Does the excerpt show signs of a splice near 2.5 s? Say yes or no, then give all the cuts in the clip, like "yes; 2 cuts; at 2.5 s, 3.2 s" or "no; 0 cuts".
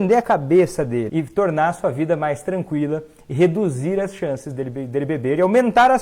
no; 1 cut; at 1.1 s